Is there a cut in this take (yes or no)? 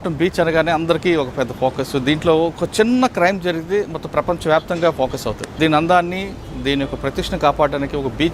yes